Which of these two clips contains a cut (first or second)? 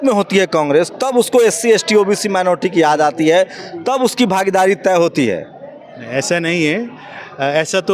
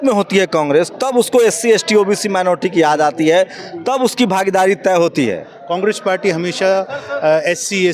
second